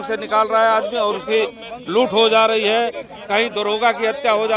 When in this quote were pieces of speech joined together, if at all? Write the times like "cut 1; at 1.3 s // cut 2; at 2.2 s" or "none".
none